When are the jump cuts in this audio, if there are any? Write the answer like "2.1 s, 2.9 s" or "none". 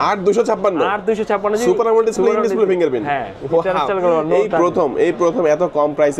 none